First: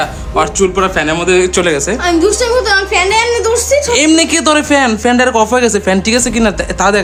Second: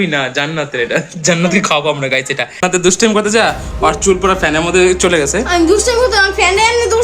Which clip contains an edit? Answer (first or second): second